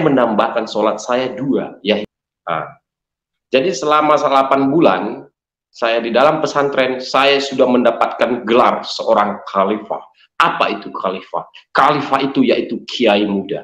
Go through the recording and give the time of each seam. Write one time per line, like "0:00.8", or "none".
0:02.1